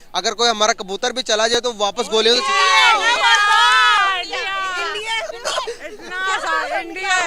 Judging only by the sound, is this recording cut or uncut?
uncut